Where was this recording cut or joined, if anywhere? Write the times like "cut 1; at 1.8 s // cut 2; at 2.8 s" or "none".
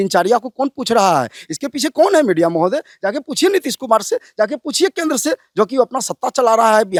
none